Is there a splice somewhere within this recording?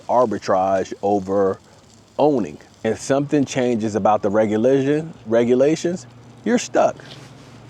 yes; 1 cut; at 2.6 s

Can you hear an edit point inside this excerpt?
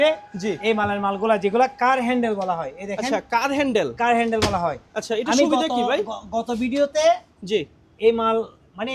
no; 0 cuts

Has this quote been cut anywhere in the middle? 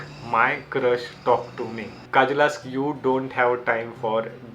yes; 1 cut; at 2.0 s

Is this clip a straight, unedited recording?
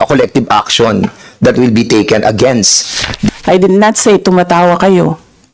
no; 1 cut; at 3.3 s

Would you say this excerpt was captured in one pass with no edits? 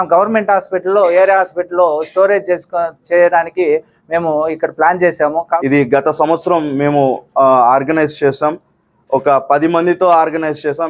no; 1 cut; at 5.6 s

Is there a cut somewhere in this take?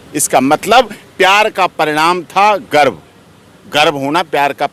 no; 0 cuts

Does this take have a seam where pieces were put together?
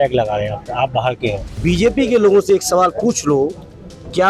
yes; 1 cut; at 1.5 s

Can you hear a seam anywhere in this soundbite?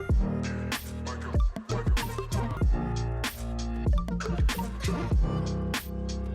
yes; 1 cut; at 5.2 s

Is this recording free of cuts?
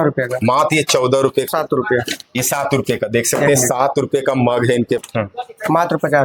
no; 2 cuts; at 1.5 s, 5.1 s

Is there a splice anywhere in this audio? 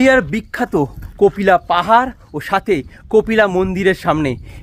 no; 0 cuts

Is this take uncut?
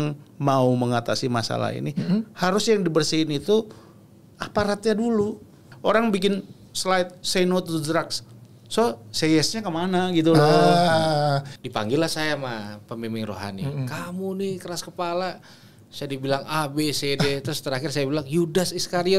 no; 2 cuts; at 5.7 s, 11.5 s

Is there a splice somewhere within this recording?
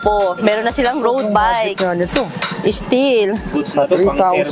no; 0 cuts

